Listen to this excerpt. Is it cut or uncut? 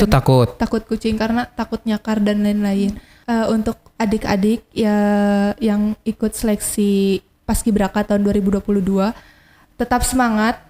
cut